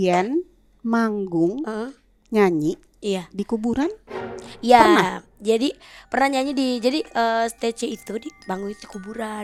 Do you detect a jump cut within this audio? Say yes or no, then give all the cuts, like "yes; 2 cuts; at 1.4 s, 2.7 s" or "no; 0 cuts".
no; 0 cuts